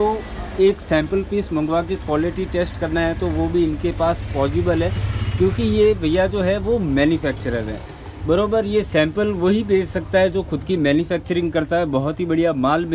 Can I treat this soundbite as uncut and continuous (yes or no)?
yes